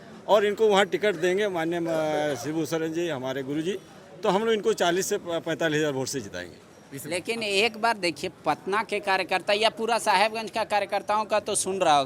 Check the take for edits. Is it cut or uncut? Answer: uncut